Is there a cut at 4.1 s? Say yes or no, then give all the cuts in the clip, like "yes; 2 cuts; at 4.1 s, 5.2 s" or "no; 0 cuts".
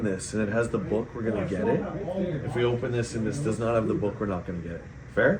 no; 0 cuts